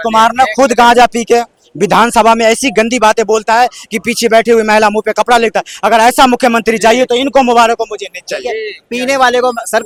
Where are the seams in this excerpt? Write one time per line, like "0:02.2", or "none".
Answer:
none